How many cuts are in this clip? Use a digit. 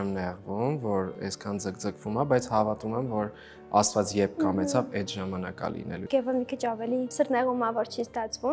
3